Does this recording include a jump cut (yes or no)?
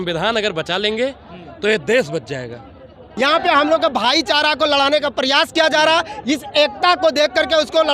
yes